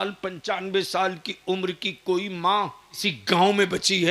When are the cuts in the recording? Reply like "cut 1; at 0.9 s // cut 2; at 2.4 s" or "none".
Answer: cut 1; at 3.0 s